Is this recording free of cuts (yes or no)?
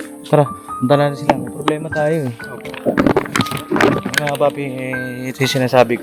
yes